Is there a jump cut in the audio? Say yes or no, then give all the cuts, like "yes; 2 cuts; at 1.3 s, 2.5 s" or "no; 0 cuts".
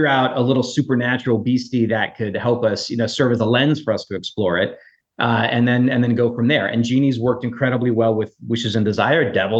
no; 0 cuts